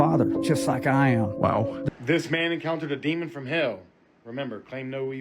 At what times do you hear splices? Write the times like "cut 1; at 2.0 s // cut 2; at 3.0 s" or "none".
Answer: cut 1; at 1.8 s